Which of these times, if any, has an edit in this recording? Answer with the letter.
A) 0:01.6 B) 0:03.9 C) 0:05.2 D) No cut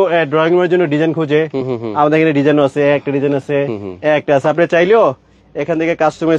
D